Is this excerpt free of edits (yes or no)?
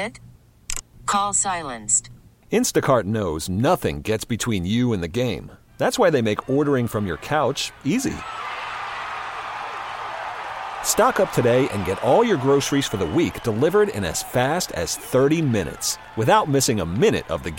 yes